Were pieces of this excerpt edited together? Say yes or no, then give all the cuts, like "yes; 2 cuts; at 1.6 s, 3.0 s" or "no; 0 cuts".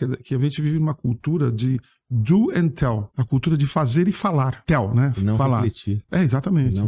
yes; 2 cuts; at 3.1 s, 4.6 s